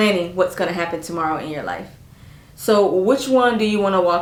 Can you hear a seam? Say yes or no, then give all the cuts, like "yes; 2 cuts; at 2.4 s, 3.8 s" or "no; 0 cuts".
no; 0 cuts